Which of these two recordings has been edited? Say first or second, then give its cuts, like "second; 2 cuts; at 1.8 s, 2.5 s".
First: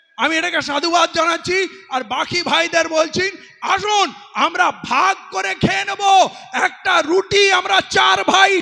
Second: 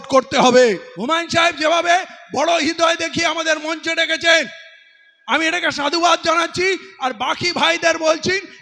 second; 1 cut; at 0.9 s